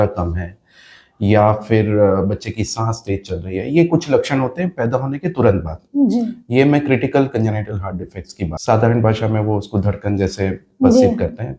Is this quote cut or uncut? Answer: cut